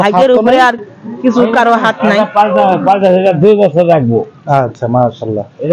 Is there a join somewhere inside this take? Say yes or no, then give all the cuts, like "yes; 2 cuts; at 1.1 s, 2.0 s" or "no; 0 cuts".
no; 0 cuts